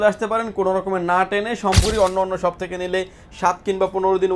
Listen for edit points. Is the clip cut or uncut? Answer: cut